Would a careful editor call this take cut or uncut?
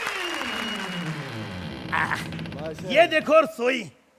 uncut